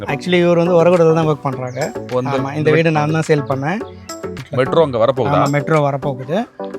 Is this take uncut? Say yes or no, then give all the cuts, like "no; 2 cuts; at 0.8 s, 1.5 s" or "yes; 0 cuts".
no; 1 cut; at 4.0 s